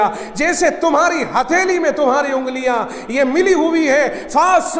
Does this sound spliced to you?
no; 0 cuts

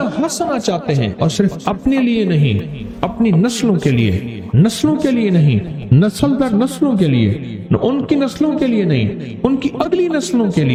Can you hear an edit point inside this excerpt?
no; 0 cuts

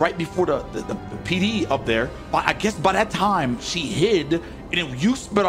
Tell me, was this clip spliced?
no; 0 cuts

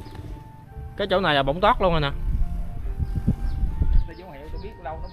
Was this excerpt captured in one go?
no; 1 cut; at 4.0 s

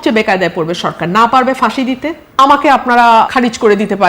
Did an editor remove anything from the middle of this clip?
yes; 2 cuts; at 2.2 s, 3.3 s

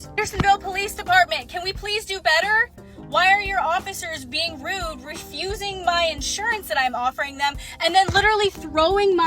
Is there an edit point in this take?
no; 0 cuts

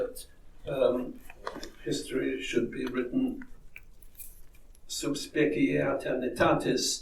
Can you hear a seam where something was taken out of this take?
no; 0 cuts

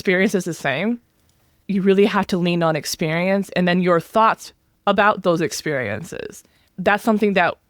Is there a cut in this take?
yes; 2 cuts; at 1.5 s, 6.6 s

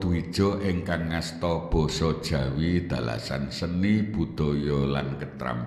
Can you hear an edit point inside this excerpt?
no; 0 cuts

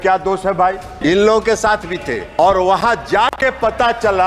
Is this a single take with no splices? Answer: no; 2 cuts; at 0.9 s, 2.2 s

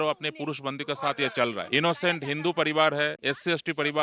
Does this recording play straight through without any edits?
no; 1 cut; at 1.6 s

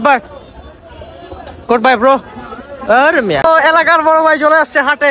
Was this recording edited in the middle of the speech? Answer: yes; 1 cut; at 3.4 s

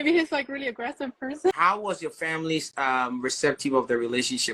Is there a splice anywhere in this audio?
yes; 1 cut; at 1.5 s

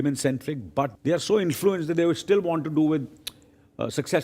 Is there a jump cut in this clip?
yes; 1 cut; at 0.9 s

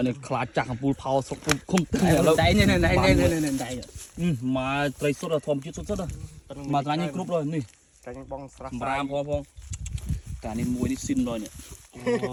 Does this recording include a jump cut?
no; 0 cuts

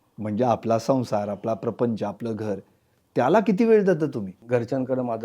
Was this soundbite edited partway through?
yes; 1 cut; at 4.3 s

